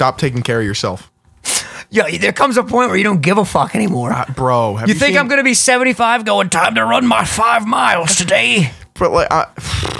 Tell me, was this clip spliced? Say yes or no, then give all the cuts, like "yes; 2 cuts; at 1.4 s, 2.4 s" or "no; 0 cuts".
no; 0 cuts